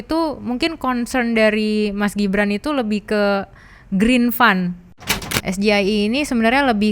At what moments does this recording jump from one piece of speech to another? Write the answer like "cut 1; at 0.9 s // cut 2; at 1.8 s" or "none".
cut 1; at 4.9 s